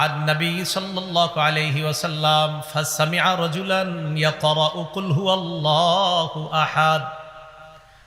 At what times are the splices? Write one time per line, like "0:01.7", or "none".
none